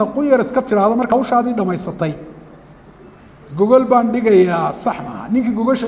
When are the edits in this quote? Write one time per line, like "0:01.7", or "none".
0:01.1

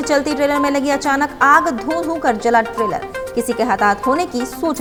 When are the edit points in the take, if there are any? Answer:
none

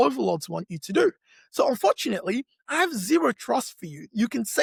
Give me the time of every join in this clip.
none

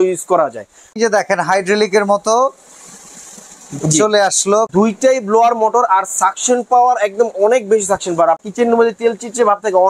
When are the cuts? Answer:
0:01.0
0:04.7
0:08.4

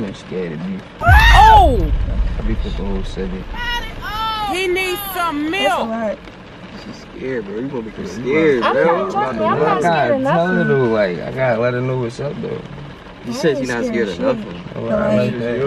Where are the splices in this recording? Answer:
none

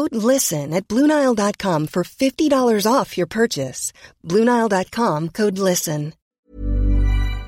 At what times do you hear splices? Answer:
0:06.4

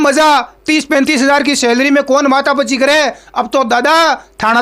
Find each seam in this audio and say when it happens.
none

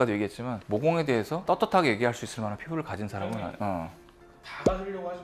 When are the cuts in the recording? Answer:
none

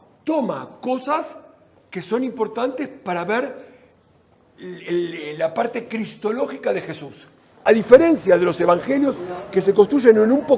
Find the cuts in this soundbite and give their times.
0:07.5

